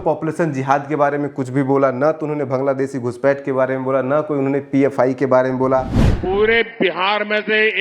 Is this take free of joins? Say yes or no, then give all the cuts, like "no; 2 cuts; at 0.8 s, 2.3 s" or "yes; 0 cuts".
no; 1 cut; at 6.0 s